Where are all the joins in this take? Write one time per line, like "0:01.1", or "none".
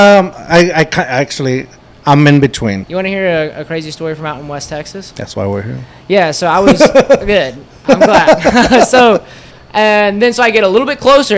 0:02.8
0:09.6

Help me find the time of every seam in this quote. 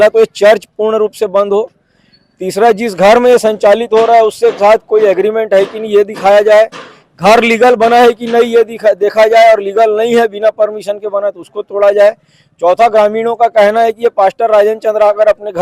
none

